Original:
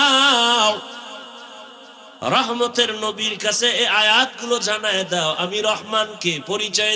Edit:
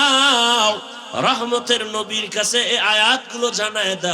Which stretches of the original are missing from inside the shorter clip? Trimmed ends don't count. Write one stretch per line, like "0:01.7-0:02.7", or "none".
0:01.0-0:02.0